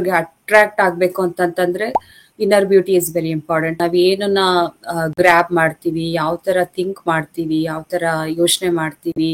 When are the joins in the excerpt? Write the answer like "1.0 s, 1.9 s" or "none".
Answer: 3.8 s